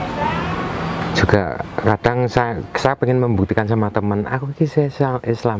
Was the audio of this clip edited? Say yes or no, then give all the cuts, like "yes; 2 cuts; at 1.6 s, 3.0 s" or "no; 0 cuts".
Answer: no; 0 cuts